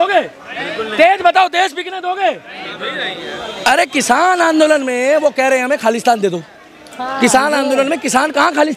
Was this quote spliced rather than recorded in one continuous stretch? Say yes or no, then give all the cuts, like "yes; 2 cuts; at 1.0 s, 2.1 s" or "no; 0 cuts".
no; 0 cuts